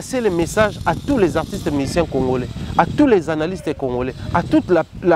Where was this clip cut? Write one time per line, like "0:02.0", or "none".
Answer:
none